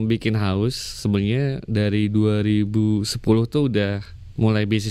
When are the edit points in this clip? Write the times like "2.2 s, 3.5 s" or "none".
none